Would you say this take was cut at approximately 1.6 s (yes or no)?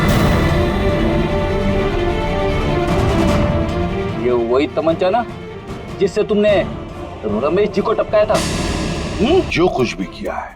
no